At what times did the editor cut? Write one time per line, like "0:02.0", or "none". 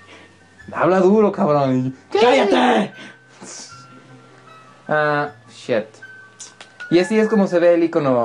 0:05.0